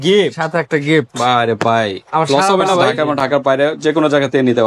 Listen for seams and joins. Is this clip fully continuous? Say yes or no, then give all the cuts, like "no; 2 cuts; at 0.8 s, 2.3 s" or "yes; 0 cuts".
no; 1 cut; at 2.9 s